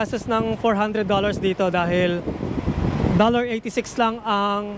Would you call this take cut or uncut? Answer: uncut